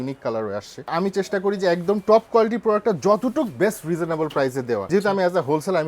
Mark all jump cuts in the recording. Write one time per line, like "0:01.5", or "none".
0:00.9
0:04.8